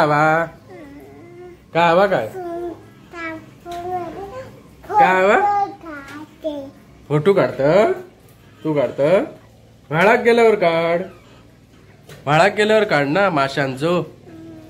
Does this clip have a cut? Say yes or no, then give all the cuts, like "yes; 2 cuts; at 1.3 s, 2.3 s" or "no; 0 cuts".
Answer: no; 0 cuts